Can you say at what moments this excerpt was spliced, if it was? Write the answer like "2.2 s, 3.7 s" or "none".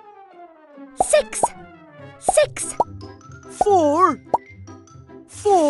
none